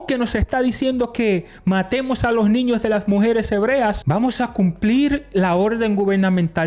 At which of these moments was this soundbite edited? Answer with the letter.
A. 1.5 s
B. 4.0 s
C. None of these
B